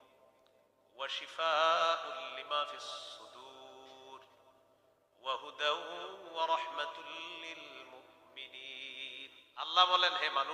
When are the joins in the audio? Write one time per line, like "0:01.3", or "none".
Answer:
0:09.6